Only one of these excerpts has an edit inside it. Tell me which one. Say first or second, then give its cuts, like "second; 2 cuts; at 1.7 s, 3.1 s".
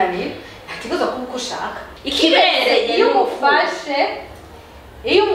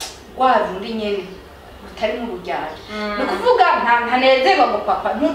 first; 1 cut; at 1.9 s